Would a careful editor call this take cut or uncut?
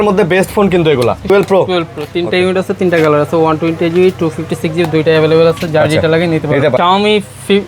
cut